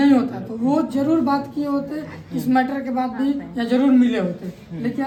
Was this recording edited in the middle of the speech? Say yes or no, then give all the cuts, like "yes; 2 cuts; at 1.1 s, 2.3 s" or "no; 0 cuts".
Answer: no; 0 cuts